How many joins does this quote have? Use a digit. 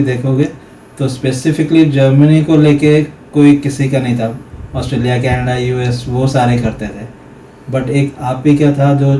0